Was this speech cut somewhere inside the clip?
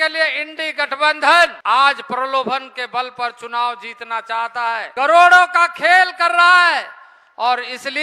yes; 2 cuts; at 1.6 s, 4.9 s

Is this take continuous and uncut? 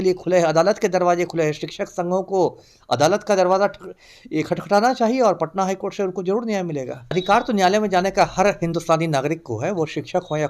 no; 1 cut; at 7.1 s

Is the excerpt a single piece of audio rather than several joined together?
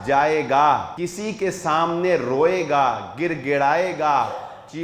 no; 1 cut; at 1.0 s

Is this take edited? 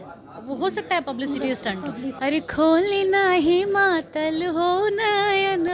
yes; 1 cut; at 2.1 s

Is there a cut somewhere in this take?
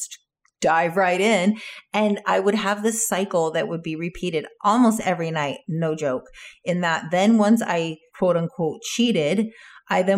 yes; 1 cut; at 8.0 s

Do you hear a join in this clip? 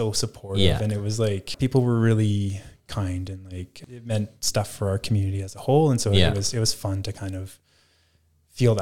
yes; 2 cuts; at 1.5 s, 3.7 s

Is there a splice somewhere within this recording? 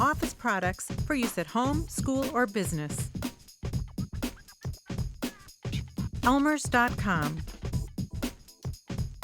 yes; 3 cuts; at 2.9 s, 6.3 s, 7.3 s

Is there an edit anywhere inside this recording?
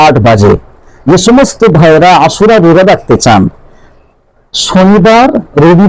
no; 0 cuts

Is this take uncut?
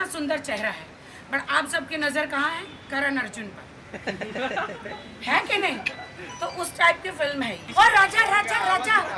no; 1 cut; at 7.6 s

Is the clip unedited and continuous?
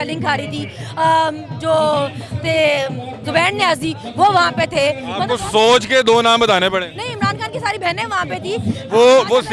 yes; 0 cuts

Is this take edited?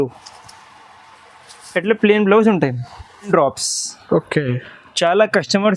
yes; 1 cut; at 3.3 s

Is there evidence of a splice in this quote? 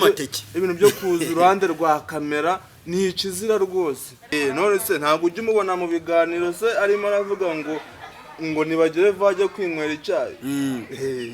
yes; 1 cut; at 4.3 s

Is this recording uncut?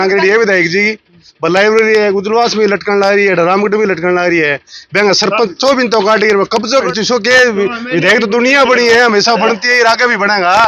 no; 1 cut; at 6.7 s

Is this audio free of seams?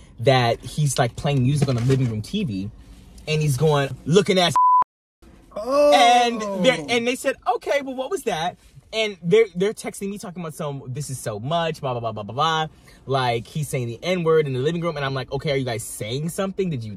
no; 1 cut; at 3.9 s

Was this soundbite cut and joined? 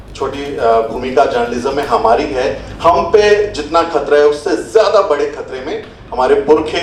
no; 0 cuts

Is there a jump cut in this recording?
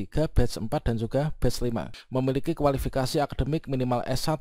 yes; 1 cut; at 2.0 s

